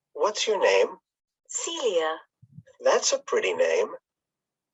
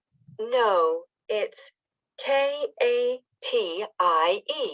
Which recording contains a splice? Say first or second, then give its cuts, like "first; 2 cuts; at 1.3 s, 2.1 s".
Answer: second; 2 cuts; at 2.7 s, 3.7 s